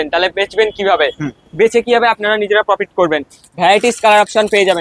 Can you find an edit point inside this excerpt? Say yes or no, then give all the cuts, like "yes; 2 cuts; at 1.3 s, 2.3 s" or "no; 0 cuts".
no; 0 cuts